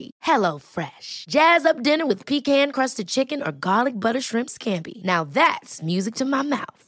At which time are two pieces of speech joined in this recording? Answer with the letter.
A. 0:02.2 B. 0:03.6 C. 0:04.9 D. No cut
D